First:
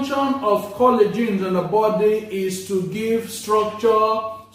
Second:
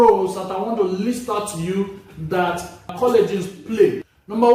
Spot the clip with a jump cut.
second; 1 cut; at 2.9 s

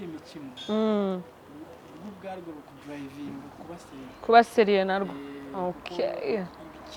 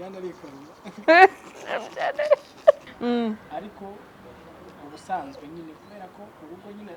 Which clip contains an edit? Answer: second; 1 cut; at 2.9 s

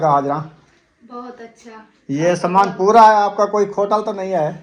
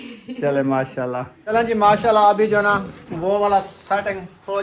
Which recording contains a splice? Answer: second; 1 cut; at 1.3 s

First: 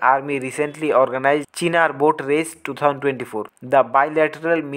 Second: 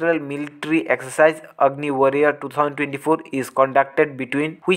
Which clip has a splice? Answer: first; 2 cuts; at 1.5 s, 3.5 s

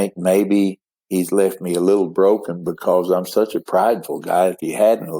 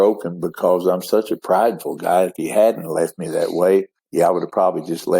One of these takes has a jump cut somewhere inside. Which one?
second; 1 cut; at 4.0 s

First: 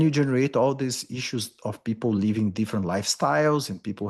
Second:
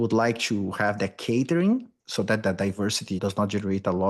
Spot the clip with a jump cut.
second; 1 cut; at 2.1 s

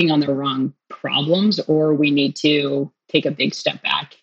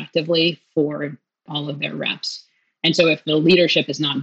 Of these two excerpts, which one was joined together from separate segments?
second; 2 cuts; at 1.4 s, 3.2 s

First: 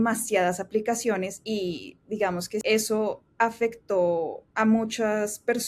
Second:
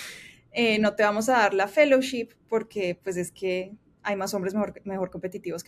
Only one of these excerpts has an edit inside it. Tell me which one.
first; 3 cuts; at 1.4 s, 2.6 s, 4.4 s

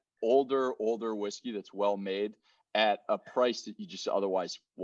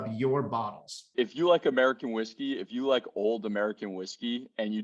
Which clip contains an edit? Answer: second; 1 cut; at 1.1 s

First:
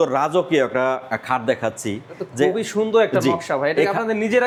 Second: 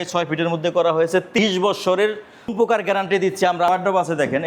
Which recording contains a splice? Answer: second; 3 cuts; at 1.4 s, 2.5 s, 3.7 s

